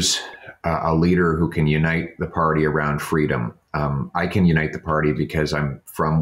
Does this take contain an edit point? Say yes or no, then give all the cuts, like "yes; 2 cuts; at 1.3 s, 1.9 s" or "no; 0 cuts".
no; 0 cuts